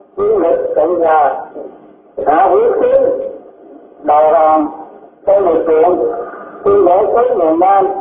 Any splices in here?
no; 0 cuts

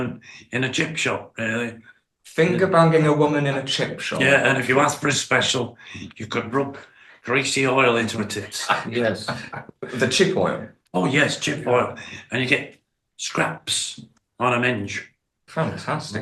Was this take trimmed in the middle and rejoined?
no; 0 cuts

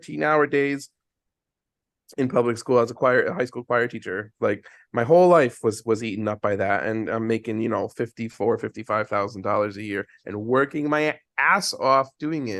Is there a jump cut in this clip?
no; 0 cuts

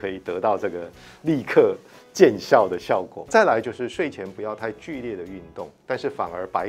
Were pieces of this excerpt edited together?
yes; 1 cut; at 3.3 s

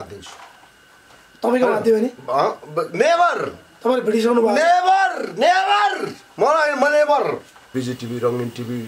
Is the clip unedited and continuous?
no; 1 cut; at 7.7 s

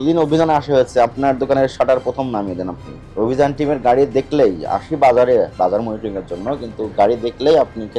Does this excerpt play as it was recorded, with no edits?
yes; 0 cuts

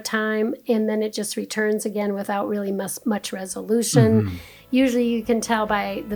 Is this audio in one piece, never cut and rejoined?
yes; 0 cuts

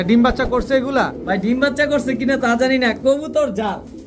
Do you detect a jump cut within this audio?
no; 0 cuts

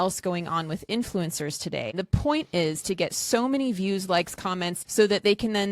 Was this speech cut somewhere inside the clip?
yes; 2 cuts; at 1.9 s, 4.8 s

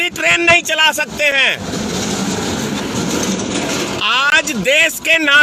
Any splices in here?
no; 0 cuts

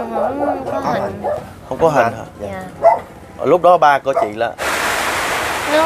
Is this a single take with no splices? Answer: no; 1 cut; at 4.6 s

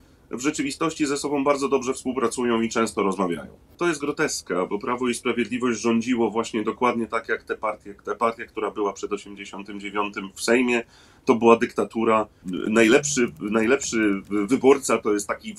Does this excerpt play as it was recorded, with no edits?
no; 2 cuts; at 3.7 s, 12.5 s

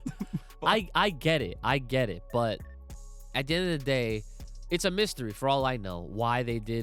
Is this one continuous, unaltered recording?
yes; 0 cuts

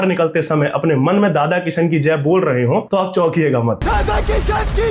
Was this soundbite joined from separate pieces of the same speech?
yes; 2 cuts; at 2.9 s, 3.8 s

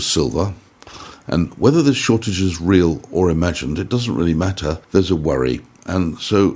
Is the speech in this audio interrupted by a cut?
yes; 1 cut; at 4.8 s

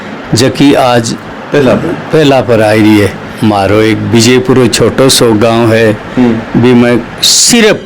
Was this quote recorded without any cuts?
no; 1 cut; at 3.3 s

